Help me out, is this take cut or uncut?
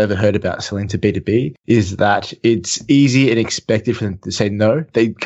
uncut